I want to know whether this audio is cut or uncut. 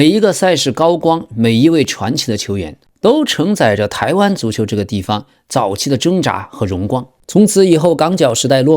cut